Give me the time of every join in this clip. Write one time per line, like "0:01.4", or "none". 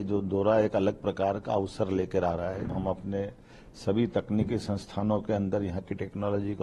0:02.7